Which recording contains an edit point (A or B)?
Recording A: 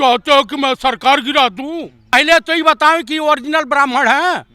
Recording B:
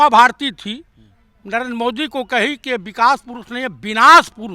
A